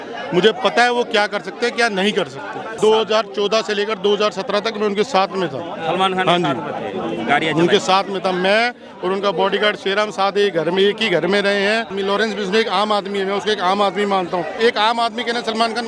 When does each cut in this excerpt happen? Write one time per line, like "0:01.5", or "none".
0:02.7
0:11.9
0:14.6